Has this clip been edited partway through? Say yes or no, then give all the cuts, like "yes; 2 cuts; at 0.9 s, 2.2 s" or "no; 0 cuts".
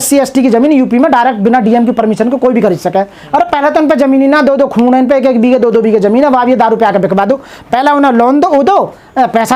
no; 0 cuts